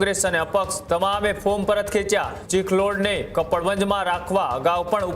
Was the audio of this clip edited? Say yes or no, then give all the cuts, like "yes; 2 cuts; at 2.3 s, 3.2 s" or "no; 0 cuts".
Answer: yes; 1 cut; at 2.4 s